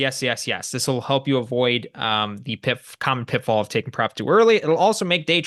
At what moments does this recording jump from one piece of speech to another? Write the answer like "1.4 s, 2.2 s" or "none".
none